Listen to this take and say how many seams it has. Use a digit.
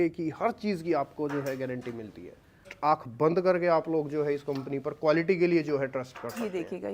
1